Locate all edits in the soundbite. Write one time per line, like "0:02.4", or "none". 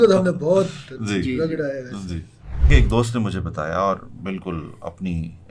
0:02.7